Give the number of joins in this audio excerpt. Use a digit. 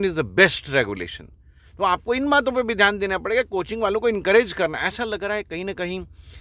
0